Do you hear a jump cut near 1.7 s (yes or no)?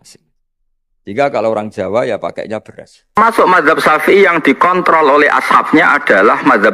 no